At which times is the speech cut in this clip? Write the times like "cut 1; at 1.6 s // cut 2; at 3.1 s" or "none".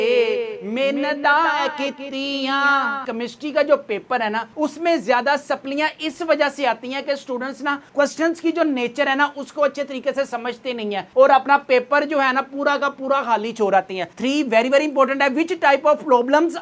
cut 1; at 3.1 s // cut 2; at 14.1 s